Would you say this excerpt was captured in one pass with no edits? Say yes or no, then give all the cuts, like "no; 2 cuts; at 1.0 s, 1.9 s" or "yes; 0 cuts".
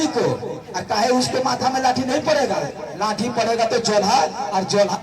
yes; 0 cuts